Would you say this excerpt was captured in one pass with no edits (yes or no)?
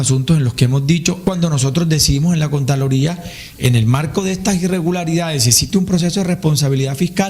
no